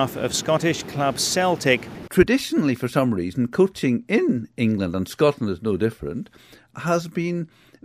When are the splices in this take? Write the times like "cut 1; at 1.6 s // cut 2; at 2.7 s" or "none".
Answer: cut 1; at 2.0 s